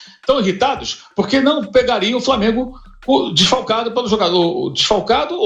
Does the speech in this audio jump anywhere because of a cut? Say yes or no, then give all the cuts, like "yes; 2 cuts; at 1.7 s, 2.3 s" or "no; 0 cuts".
no; 0 cuts